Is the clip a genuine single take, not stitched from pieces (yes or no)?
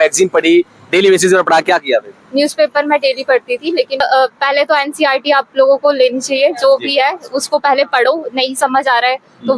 no